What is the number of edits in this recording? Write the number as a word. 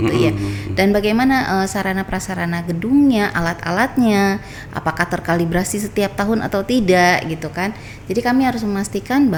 zero